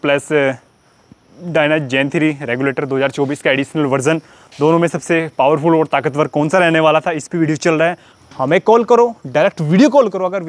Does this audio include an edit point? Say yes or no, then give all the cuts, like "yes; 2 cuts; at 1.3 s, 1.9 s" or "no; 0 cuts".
yes; 1 cut; at 8.1 s